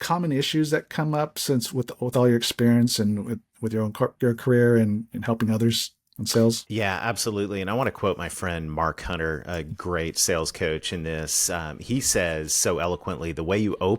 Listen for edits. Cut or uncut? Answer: cut